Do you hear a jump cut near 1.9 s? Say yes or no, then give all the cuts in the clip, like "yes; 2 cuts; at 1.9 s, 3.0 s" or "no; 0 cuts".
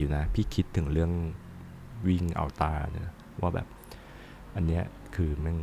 yes; 1 cut; at 1.9 s